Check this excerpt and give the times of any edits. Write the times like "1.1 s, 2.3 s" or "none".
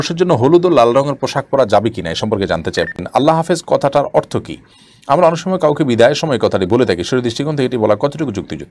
3.0 s